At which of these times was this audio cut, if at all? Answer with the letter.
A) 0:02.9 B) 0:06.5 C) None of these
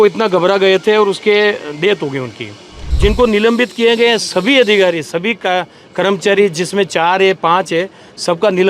A